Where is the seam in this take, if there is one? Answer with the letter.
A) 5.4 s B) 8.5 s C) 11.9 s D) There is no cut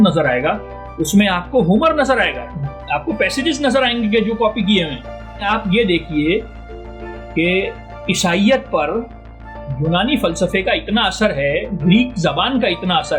A